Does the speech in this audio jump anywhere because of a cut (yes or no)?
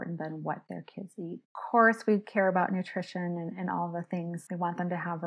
yes